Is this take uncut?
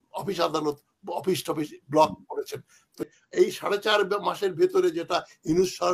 no; 1 cut; at 3.0 s

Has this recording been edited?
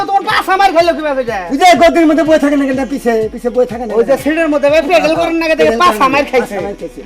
no; 0 cuts

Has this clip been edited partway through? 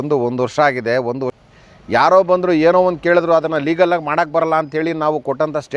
yes; 1 cut; at 1.3 s

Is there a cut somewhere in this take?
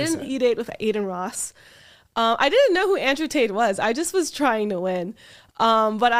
no; 0 cuts

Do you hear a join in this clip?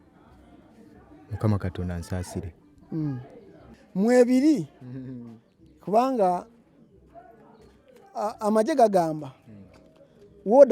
yes; 1 cut; at 3.7 s

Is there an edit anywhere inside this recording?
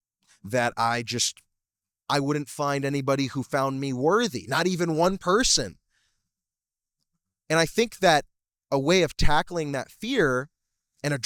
no; 0 cuts

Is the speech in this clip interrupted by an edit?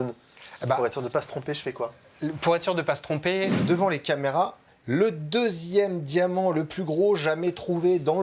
yes; 1 cut; at 3.5 s

